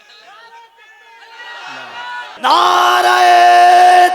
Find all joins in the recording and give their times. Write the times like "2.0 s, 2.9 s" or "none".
2.2 s